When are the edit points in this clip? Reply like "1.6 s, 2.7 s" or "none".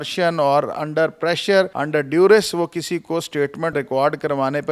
1.8 s, 3.7 s